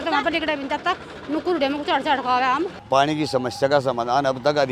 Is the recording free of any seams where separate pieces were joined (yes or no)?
no